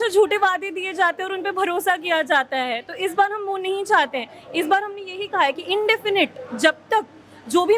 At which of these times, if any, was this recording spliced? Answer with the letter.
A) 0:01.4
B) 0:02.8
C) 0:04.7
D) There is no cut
D